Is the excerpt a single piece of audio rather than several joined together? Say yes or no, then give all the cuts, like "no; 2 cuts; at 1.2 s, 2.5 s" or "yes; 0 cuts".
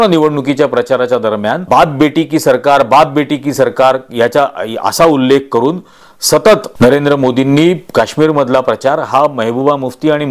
no; 2 cuts; at 1.6 s, 6.7 s